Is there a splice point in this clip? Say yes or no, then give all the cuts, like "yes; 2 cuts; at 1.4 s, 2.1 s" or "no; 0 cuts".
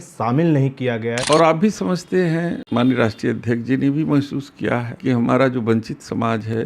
yes; 3 cuts; at 1.2 s, 2.6 s, 4.9 s